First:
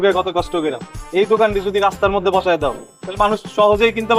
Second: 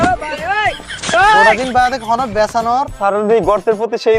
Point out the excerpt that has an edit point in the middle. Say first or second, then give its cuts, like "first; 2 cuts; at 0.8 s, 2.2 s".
second; 2 cuts; at 1.5 s, 2.9 s